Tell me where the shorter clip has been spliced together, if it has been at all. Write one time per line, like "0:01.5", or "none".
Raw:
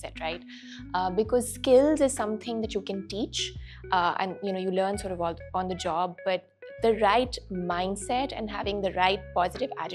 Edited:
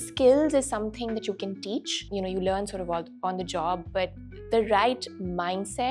0:02.0